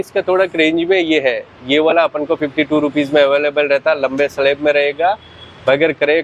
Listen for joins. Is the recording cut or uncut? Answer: uncut